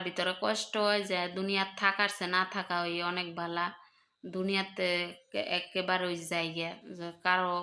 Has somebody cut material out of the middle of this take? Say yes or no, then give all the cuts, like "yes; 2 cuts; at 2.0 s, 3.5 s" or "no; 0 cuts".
no; 0 cuts